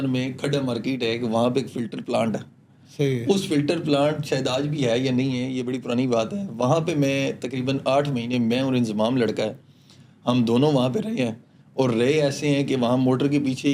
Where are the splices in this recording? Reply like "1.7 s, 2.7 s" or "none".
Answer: none